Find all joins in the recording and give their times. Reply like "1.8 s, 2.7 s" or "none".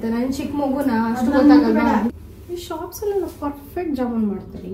2.1 s